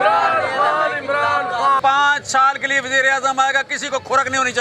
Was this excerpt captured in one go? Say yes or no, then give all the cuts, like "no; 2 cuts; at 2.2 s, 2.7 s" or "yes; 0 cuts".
no; 1 cut; at 1.8 s